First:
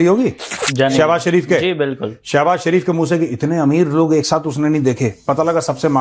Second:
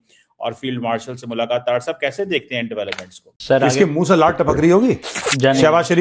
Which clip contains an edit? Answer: second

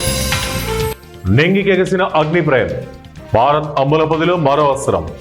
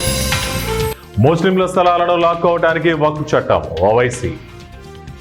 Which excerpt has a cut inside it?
first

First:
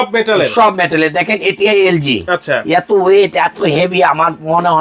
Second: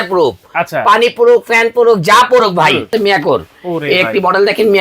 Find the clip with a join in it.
second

